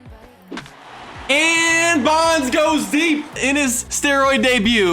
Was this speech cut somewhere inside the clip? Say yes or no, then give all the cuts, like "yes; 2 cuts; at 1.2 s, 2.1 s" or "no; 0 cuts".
yes; 1 cut; at 3.8 s